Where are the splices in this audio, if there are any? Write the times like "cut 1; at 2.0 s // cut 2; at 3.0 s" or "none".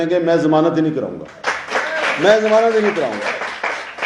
none